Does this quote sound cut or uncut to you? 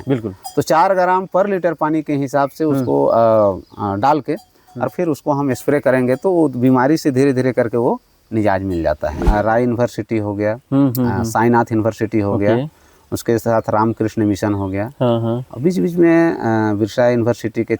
cut